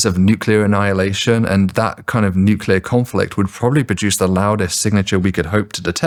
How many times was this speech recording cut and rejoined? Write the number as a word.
zero